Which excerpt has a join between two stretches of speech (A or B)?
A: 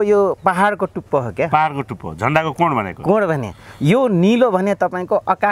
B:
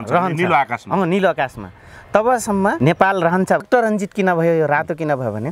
B